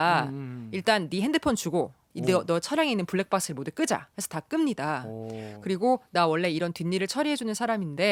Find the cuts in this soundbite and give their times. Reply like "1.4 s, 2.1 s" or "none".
none

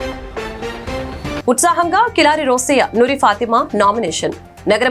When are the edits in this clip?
1.4 s

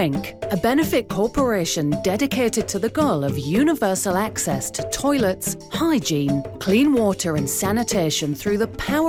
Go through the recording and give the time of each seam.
none

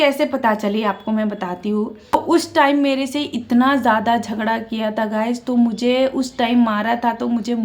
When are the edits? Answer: 2.1 s

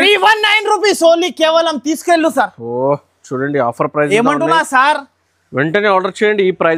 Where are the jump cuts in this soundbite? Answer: none

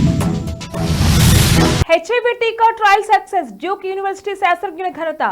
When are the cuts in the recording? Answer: 1.4 s

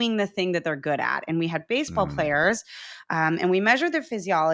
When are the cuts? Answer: none

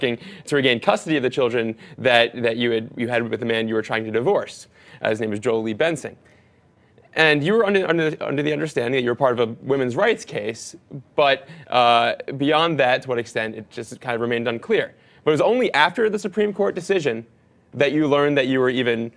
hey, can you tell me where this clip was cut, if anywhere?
16.8 s

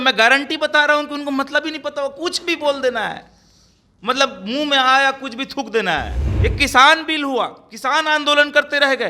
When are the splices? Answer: 6.2 s

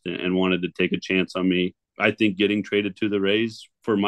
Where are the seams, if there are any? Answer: 1.8 s

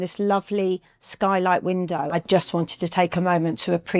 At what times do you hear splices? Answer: 2.1 s

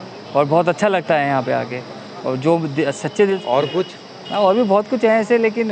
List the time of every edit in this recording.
3.4 s

